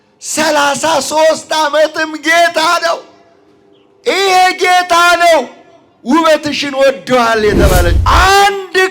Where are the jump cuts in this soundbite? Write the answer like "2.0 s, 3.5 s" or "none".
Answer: 8.0 s

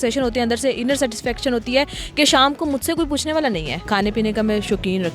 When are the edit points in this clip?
3.7 s

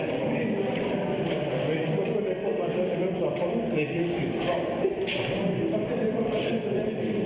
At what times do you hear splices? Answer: 1.5 s

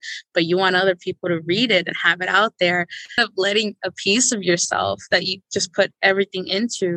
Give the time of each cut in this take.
3.2 s

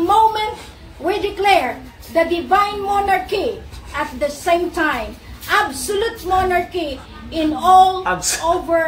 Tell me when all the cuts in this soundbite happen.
none

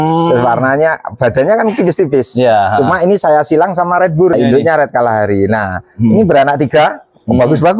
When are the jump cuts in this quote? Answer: 4.3 s

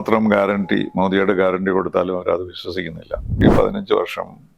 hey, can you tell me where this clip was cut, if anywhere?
3.4 s

